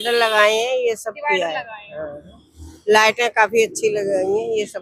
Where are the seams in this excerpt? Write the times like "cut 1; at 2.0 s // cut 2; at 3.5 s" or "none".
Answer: none